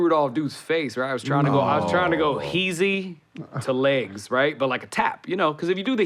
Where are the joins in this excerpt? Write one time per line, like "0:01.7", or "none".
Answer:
none